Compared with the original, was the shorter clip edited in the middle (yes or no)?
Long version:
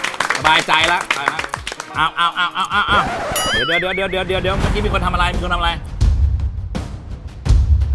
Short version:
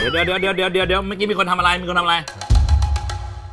no